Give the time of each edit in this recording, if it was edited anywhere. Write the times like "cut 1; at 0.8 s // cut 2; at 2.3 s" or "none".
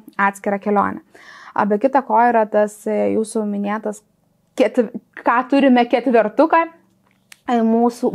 none